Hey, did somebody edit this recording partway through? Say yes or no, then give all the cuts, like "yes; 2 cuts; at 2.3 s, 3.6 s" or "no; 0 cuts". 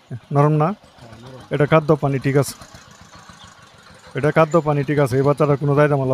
no; 0 cuts